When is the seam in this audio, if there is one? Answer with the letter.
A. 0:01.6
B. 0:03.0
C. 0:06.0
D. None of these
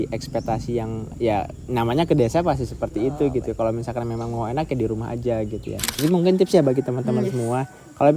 C